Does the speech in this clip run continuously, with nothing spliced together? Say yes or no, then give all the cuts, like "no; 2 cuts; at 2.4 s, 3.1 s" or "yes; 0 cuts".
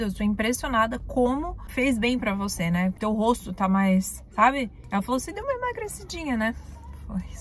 no; 3 cuts; at 1.6 s, 2.9 s, 4.8 s